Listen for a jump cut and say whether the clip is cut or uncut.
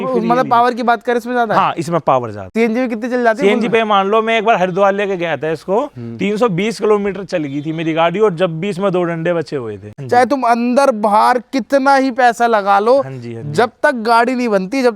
cut